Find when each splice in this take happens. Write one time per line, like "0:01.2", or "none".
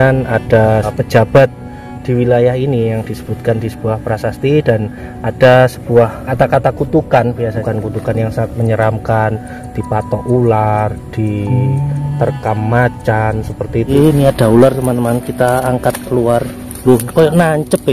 0:00.9
0:06.2
0:07.6
0:13.9